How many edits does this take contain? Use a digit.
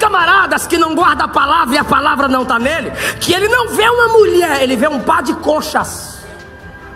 0